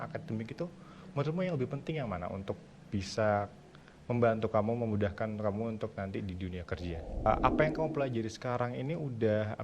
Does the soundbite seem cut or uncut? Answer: cut